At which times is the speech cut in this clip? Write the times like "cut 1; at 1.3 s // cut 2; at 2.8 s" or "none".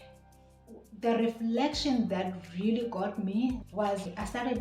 cut 1; at 3.6 s